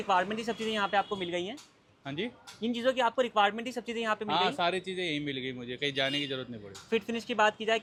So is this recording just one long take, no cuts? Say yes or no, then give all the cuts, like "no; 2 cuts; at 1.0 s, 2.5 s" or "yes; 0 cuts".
yes; 0 cuts